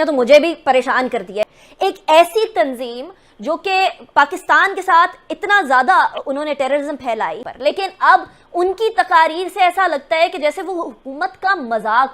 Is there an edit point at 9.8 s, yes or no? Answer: no